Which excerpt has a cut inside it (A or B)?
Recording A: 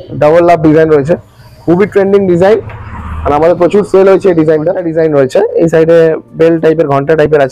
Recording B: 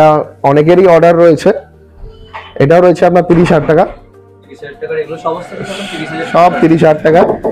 A